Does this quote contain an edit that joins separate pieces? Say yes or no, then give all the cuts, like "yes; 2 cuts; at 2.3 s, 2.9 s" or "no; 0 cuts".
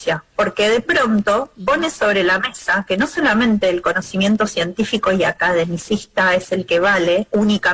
no; 0 cuts